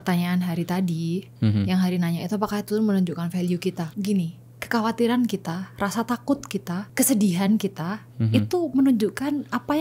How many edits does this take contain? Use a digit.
2